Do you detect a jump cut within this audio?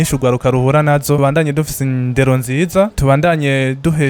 yes; 1 cut; at 1.2 s

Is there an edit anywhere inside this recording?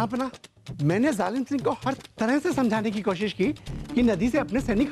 no; 0 cuts

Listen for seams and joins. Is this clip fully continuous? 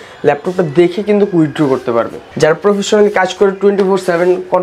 no; 1 cut; at 2.2 s

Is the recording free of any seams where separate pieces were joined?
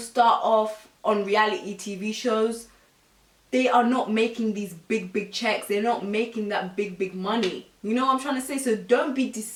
yes; 0 cuts

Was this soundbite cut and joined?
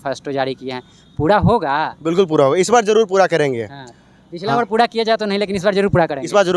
no; 0 cuts

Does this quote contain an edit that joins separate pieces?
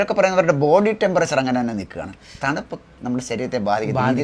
no; 0 cuts

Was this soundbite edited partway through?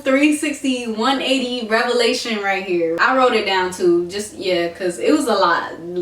yes; 1 cut; at 3.0 s

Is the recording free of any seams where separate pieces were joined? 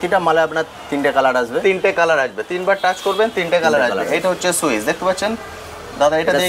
yes; 0 cuts

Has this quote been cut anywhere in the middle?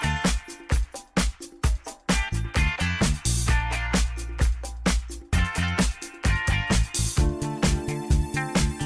no; 0 cuts

